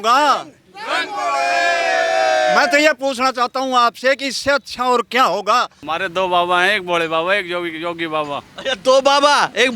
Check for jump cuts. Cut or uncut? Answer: cut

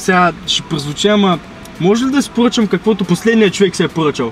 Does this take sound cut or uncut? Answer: cut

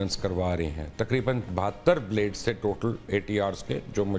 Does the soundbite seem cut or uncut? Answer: uncut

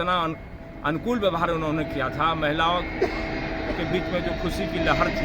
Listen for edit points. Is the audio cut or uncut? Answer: uncut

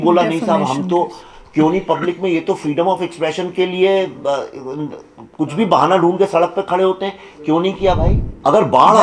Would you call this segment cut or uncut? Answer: cut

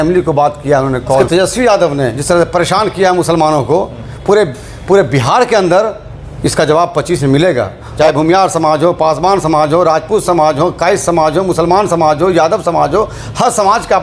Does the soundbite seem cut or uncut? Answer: cut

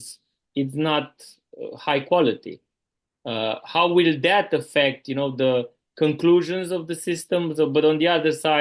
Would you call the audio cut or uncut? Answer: uncut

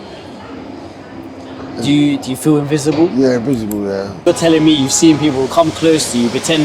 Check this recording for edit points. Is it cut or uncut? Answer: cut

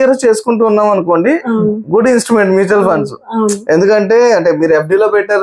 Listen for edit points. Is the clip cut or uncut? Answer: uncut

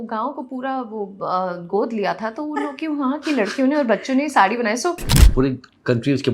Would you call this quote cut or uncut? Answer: cut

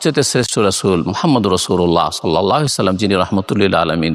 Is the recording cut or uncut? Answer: uncut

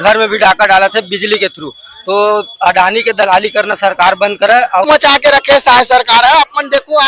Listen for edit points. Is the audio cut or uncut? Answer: cut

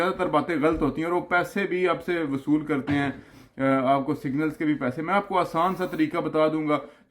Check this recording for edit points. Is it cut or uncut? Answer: uncut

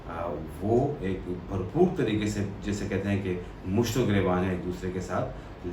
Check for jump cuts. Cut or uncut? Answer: uncut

